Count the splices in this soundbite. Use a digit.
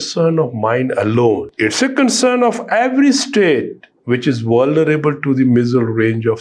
1